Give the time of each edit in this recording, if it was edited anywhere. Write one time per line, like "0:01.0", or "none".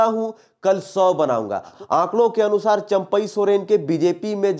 0:01.7